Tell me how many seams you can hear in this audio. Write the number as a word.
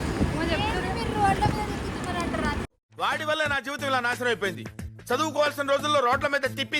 zero